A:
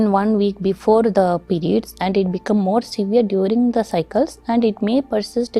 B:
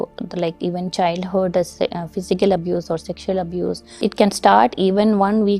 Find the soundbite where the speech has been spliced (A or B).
B